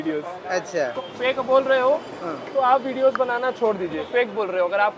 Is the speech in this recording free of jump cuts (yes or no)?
no